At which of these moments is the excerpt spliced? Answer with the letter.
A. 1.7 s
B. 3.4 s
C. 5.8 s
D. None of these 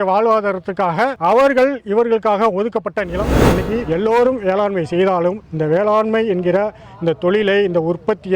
B